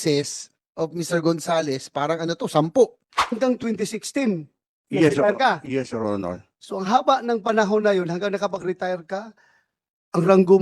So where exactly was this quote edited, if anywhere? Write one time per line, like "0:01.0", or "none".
0:03.4